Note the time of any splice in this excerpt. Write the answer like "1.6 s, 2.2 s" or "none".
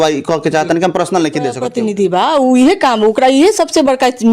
1.7 s